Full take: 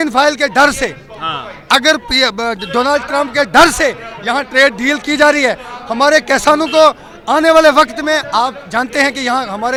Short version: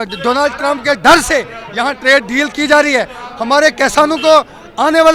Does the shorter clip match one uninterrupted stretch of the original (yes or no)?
yes